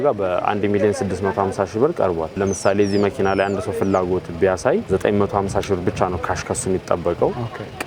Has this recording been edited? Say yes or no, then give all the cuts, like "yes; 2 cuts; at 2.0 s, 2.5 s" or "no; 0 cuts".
no; 0 cuts